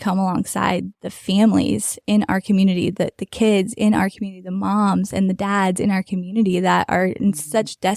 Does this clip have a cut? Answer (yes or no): no